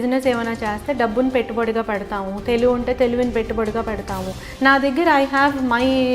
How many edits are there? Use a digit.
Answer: 1